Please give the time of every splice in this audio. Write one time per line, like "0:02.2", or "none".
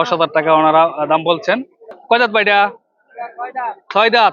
0:02.0